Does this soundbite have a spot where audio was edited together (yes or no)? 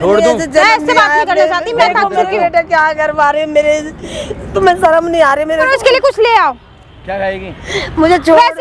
yes